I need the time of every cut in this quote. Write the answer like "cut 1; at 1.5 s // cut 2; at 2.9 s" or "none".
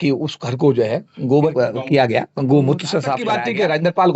cut 1; at 1.5 s // cut 2; at 3.4 s